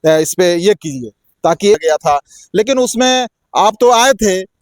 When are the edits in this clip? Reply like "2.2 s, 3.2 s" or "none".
1.7 s